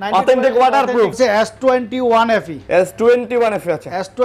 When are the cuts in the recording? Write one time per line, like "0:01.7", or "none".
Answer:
0:01.1